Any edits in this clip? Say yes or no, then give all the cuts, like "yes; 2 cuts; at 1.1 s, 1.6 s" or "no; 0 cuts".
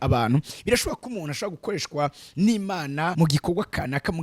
yes; 1 cut; at 3.1 s